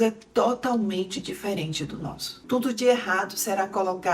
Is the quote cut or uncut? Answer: cut